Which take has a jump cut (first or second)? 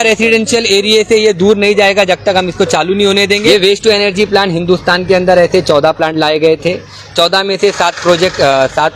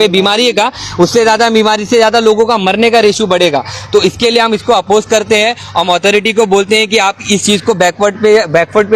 first